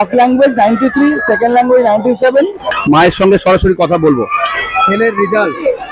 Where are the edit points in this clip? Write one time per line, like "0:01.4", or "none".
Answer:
0:02.7